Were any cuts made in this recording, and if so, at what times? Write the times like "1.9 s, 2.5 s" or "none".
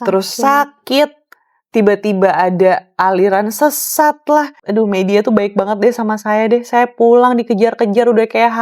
4.6 s